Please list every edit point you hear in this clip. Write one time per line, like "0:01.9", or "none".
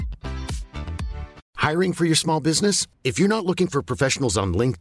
0:01.4

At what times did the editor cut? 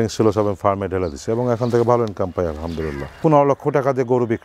0:03.2

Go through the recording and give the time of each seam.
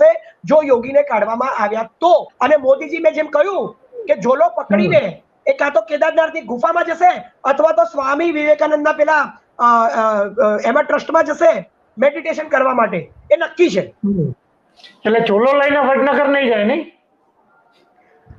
none

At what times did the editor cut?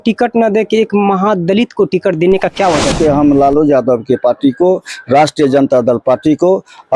0:03.0

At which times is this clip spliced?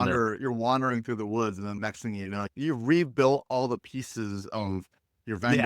0:02.1

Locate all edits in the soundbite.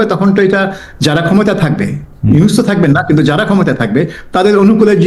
none

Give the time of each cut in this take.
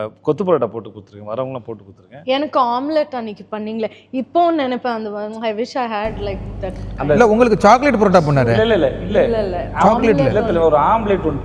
none

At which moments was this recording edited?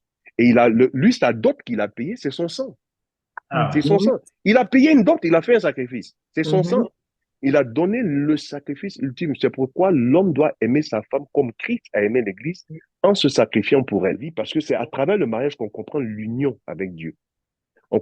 0:14.3

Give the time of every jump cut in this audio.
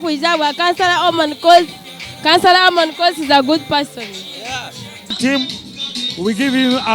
0:05.2

